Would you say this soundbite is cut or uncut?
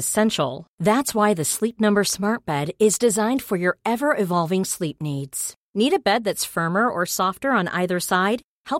uncut